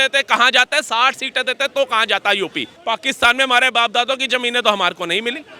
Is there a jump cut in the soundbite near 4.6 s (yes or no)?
no